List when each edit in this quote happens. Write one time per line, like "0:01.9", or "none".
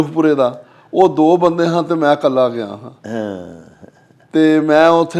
none

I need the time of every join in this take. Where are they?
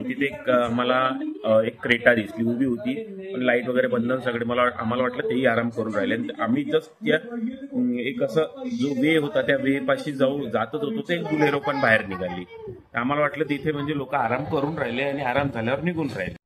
none

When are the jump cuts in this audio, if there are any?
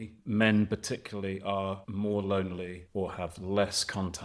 0:01.8
0:02.8

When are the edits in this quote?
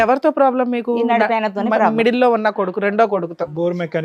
none

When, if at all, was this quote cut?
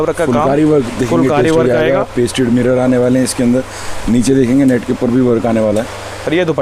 none

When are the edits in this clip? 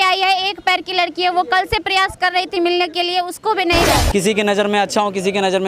0:04.0

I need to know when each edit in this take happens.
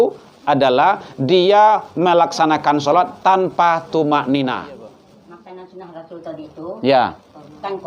0:05.1

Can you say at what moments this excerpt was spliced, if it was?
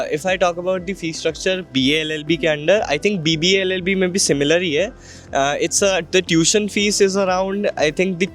none

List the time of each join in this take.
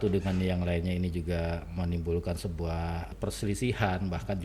0:03.1

